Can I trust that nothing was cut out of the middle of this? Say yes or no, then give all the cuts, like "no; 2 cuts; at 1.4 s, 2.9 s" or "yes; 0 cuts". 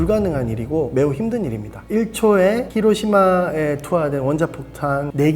no; 1 cut; at 1.8 s